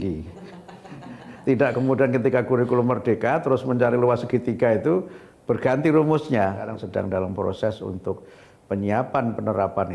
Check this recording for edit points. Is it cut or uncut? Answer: cut